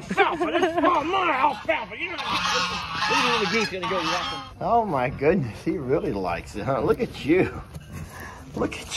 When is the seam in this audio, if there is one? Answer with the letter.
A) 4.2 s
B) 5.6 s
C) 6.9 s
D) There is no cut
A